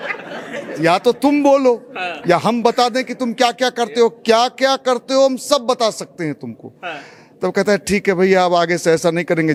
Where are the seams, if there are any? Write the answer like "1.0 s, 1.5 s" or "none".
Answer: none